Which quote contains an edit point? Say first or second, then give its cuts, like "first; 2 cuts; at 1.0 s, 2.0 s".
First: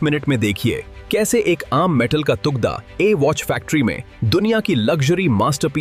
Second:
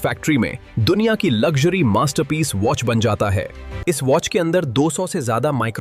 second; 1 cut; at 3.6 s